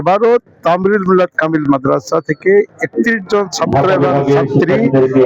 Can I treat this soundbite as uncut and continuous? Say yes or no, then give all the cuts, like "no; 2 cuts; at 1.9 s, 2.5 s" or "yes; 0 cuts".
yes; 0 cuts